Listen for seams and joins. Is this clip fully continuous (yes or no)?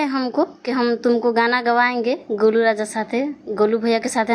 yes